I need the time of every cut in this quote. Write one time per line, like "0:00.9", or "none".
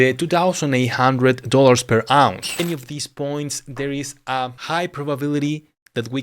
0:02.4

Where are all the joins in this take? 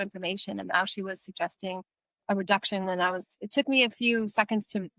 none

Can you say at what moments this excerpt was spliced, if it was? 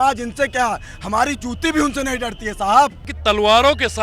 0:03.1

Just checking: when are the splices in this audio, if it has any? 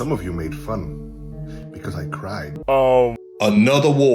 0:02.5
0:03.2

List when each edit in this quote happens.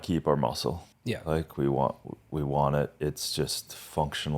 0:00.9

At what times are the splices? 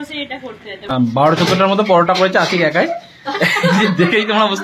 0:00.9

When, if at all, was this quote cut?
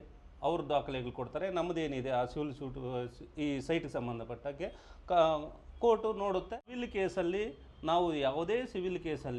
0:06.8

